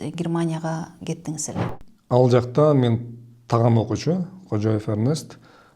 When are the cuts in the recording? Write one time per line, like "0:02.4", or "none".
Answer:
0:01.9